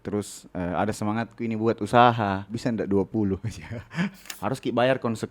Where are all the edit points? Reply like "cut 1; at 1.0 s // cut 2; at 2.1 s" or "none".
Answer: cut 1; at 2.5 s // cut 2; at 4.2 s